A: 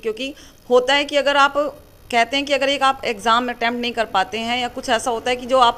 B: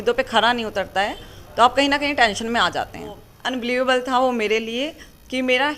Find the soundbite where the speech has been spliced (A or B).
B